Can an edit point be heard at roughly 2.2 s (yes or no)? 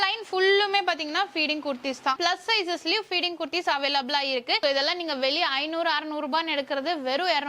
yes